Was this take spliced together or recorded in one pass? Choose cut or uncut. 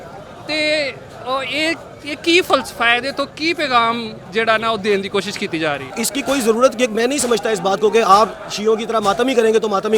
cut